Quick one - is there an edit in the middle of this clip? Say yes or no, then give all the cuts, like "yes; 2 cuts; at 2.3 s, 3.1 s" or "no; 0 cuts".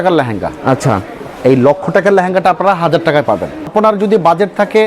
yes; 1 cut; at 3.7 s